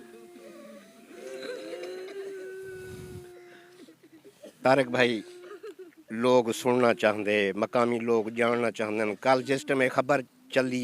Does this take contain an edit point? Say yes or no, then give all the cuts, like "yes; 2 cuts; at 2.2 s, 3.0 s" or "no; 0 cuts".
yes; 1 cut; at 4.3 s